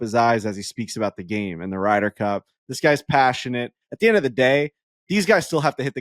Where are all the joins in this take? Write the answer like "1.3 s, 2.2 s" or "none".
3.8 s